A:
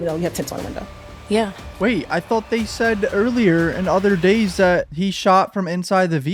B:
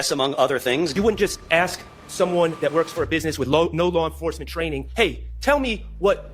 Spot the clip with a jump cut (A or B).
B